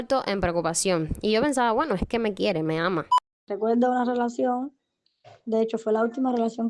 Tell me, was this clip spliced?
yes; 1 cut; at 3.5 s

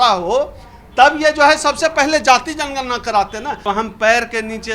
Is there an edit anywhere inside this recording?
yes; 1 cut; at 3.6 s

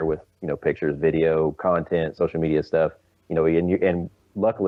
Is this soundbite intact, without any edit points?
yes; 0 cuts

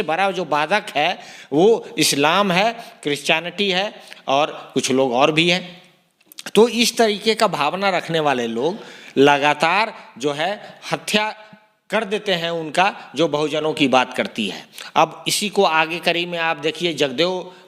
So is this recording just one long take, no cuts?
yes; 0 cuts

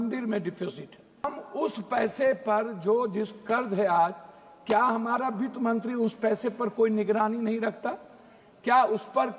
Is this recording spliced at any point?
yes; 1 cut; at 1.3 s

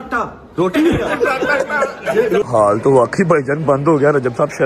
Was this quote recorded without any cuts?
no; 1 cut; at 2.5 s

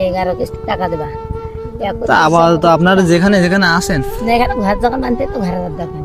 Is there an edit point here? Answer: no; 0 cuts

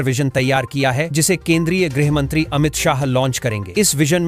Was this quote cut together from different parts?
no; 0 cuts

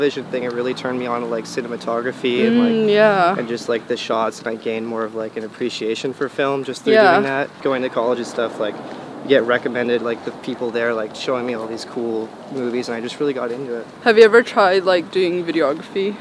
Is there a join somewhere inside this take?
no; 0 cuts

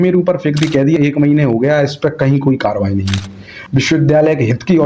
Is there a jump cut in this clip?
yes; 2 cuts; at 1.0 s, 3.6 s

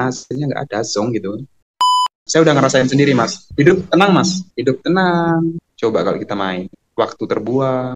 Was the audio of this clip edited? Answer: yes; 4 cuts; at 2.1 s, 3.4 s, 4.5 s, 5.7 s

